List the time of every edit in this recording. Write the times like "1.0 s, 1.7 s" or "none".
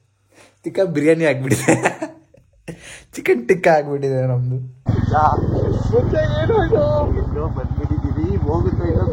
4.8 s